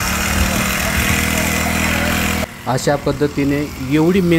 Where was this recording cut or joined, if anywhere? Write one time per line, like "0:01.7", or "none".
0:02.4

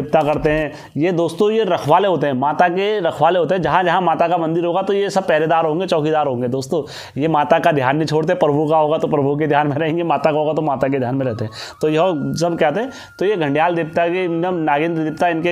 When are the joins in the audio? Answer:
none

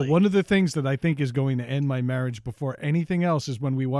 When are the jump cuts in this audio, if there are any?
none

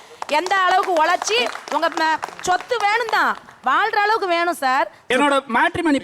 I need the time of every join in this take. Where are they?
0:05.1

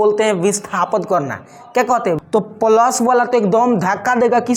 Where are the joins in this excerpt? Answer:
0:02.2

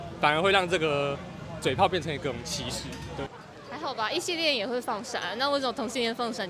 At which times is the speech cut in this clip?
0:03.3

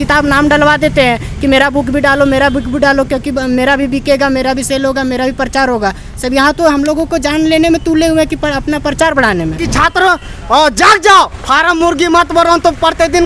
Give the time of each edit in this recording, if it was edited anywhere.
0:09.6

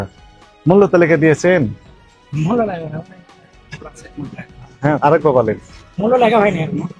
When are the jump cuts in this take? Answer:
none

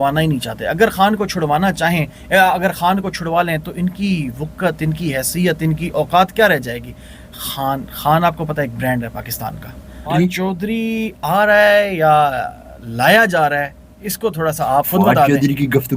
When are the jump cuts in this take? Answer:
0:10.1

